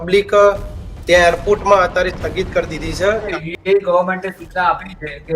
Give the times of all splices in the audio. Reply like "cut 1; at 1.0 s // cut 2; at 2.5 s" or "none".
cut 1; at 3.3 s

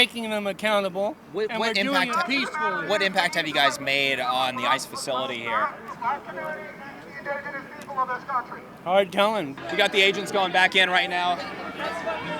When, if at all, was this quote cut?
none

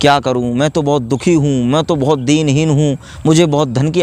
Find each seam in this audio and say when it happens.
none

